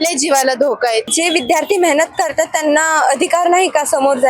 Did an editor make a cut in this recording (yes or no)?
yes